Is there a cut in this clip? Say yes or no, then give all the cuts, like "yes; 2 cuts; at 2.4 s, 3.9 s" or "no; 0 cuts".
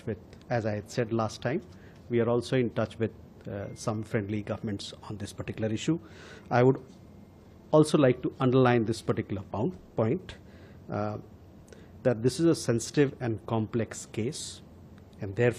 no; 0 cuts